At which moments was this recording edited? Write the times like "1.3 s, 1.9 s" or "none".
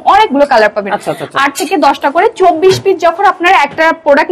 none